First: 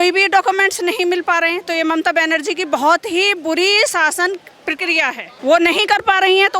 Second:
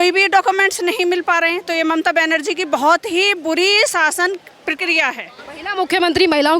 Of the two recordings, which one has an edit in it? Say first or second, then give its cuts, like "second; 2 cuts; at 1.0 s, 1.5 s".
first; 1 cut; at 5.4 s